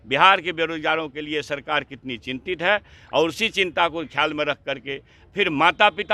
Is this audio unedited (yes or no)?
yes